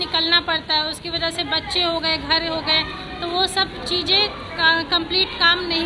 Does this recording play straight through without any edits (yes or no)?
yes